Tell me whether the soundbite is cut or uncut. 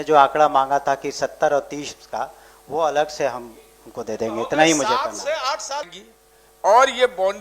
cut